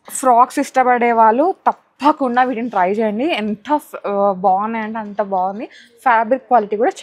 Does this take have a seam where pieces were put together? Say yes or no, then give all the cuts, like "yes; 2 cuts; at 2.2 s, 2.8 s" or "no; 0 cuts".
no; 0 cuts